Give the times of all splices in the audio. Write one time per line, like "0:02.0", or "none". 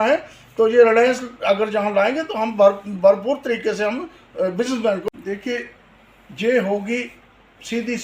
0:05.1

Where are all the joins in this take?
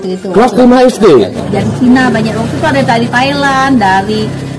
0:01.4

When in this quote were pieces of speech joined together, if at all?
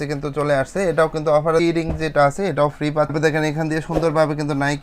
0:01.6
0:03.1

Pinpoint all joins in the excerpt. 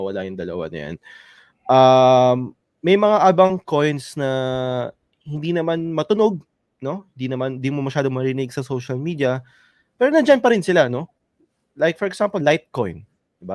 none

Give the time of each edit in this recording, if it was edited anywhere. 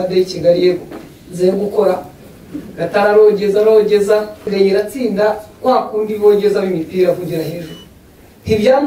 0:04.5

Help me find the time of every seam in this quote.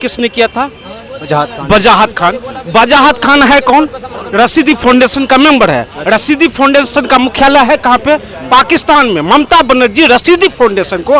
none

